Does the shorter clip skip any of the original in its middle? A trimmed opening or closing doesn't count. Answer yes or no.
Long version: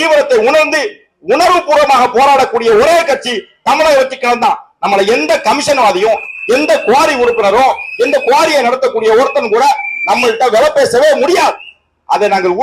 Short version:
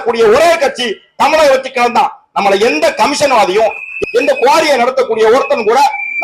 yes